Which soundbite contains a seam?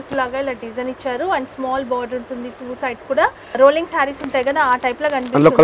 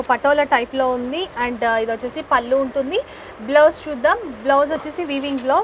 first; 1 cut; at 3.4 s

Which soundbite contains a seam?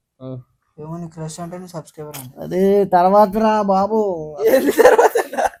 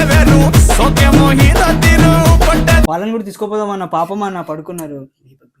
second; 1 cut; at 2.9 s

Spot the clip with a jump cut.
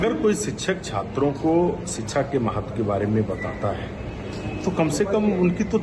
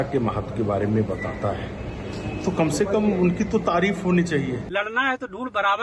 second; 1 cut; at 4.6 s

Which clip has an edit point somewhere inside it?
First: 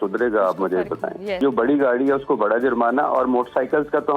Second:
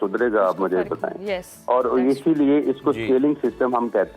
first; 1 cut; at 1.4 s

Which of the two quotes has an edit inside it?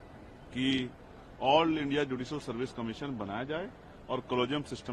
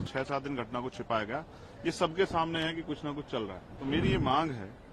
second; 1 cut; at 3.7 s

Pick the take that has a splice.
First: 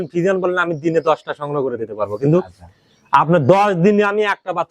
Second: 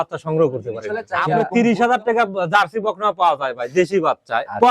second; 1 cut; at 1.1 s

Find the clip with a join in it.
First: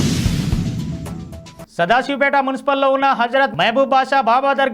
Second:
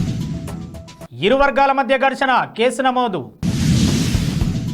second; 1 cut; at 1.0 s

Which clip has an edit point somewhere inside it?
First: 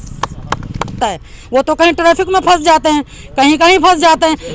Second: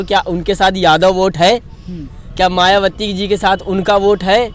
first; 1 cut; at 1.0 s

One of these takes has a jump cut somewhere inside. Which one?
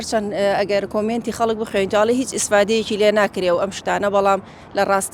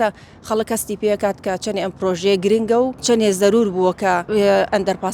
second; 2 cuts; at 3.0 s, 4.2 s

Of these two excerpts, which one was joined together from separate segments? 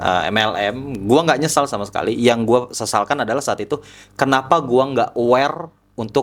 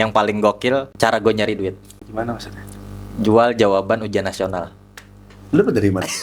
second; 2 cuts; at 0.9 s, 1.9 s

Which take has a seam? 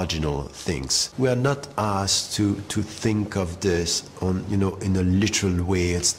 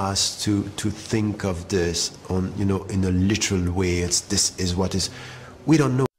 first; 1 cut; at 1.0 s

